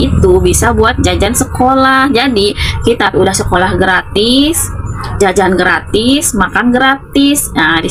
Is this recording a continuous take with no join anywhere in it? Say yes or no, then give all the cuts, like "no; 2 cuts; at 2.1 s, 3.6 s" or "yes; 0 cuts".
yes; 0 cuts